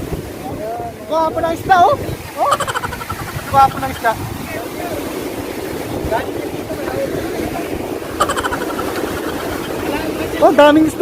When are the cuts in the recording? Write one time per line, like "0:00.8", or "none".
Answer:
0:00.9